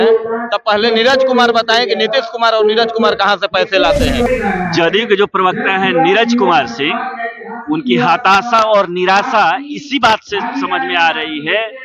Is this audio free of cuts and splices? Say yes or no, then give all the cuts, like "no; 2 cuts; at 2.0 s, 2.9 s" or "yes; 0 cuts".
no; 1 cut; at 4.3 s